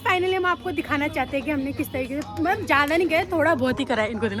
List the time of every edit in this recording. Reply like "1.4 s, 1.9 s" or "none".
none